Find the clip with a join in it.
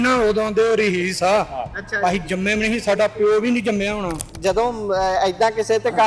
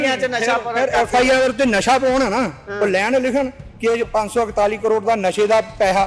first; 1 cut; at 4.2 s

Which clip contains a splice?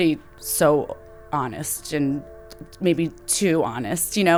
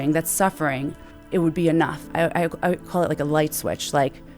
second; 2 cuts; at 1.1 s, 2.0 s

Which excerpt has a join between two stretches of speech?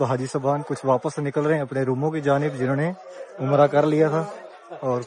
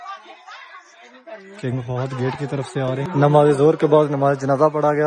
second; 1 cut; at 3.1 s

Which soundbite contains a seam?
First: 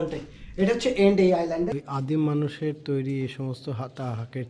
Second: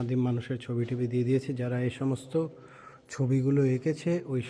first; 1 cut; at 1.8 s

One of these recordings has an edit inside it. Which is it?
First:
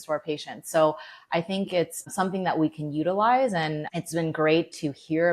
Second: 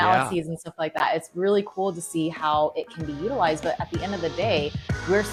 first; 2 cuts; at 2.1 s, 3.8 s

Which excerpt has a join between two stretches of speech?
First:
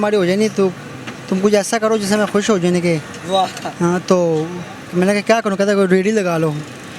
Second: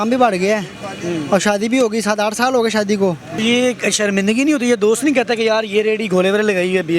second; 1 cut; at 3.4 s

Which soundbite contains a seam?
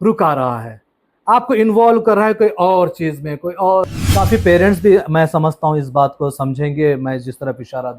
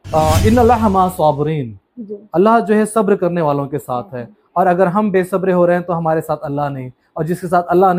first; 1 cut; at 4.0 s

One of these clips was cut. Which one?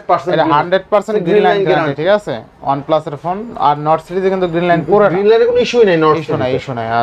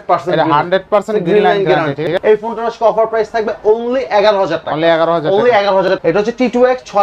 second; 2 cuts; at 2.0 s, 5.9 s

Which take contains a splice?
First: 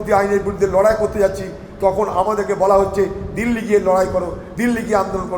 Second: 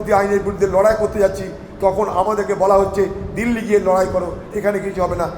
second; 1 cut; at 4.4 s

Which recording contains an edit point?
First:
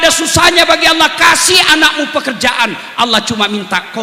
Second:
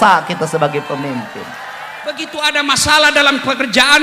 second; 1 cut; at 2.2 s

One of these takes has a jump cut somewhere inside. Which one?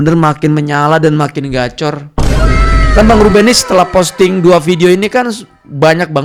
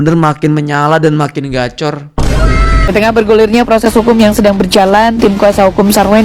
second; 1 cut; at 2.9 s

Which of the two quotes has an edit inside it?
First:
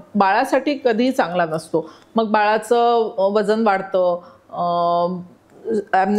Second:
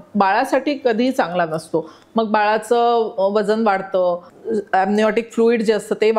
second; 1 cut; at 4.3 s

